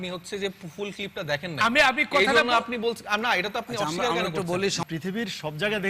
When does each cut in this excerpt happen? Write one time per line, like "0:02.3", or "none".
0:04.8